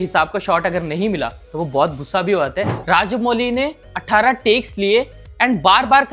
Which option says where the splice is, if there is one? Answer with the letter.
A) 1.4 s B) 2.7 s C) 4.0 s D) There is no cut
B